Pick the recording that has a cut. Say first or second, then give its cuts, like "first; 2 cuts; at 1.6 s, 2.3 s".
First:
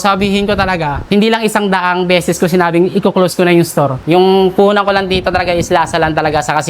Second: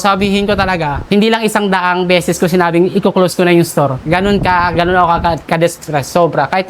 first; 1 cut; at 4.0 s